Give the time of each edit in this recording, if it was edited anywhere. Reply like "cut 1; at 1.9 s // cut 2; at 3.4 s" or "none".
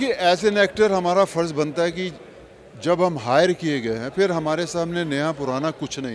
none